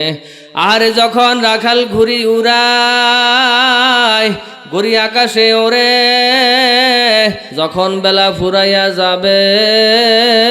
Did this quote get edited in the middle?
yes; 1 cut; at 7.5 s

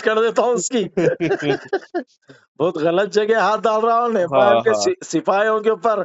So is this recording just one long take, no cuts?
yes; 0 cuts

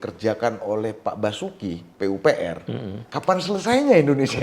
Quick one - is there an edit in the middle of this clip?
yes; 1 cut; at 3.0 s

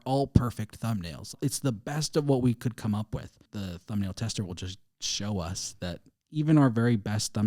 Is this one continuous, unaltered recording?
no; 2 cuts; at 1.3 s, 3.4 s

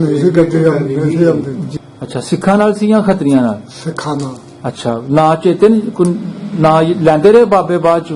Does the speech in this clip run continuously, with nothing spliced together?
no; 1 cut; at 1.7 s

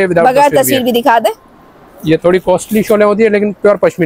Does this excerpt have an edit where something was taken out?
no; 0 cuts

